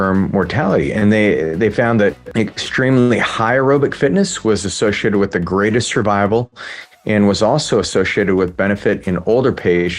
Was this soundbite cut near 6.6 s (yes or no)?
no